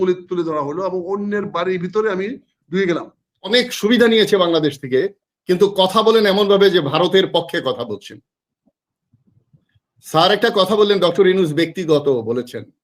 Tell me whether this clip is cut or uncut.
cut